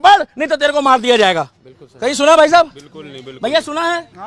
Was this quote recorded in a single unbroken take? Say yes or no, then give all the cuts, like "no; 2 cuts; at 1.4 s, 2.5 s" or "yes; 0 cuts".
yes; 0 cuts